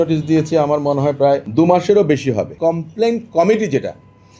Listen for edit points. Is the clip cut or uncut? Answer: cut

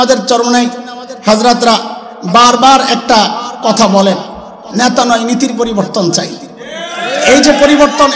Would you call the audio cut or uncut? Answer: uncut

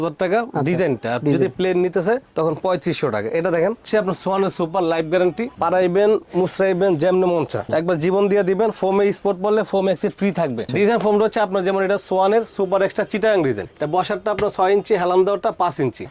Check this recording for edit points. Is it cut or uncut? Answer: cut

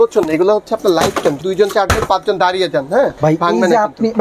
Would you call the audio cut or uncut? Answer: cut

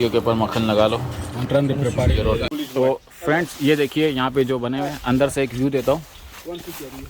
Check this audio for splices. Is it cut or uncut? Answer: cut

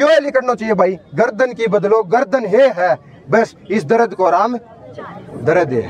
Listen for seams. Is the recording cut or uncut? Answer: uncut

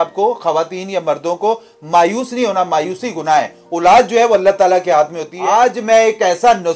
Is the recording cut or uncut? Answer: cut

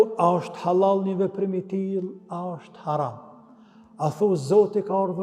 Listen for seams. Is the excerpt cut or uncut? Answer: uncut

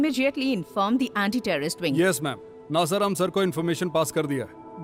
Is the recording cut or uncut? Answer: uncut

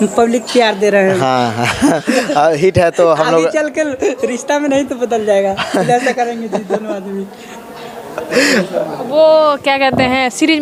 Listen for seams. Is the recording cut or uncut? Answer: uncut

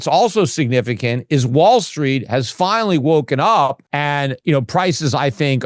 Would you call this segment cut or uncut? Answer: cut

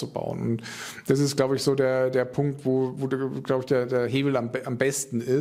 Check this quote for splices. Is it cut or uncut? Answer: uncut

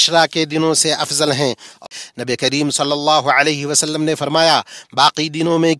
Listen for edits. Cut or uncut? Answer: cut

